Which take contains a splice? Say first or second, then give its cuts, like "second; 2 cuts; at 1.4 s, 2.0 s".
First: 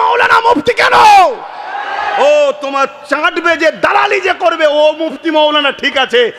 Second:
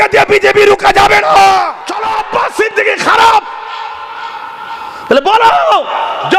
second; 1 cut; at 2.2 s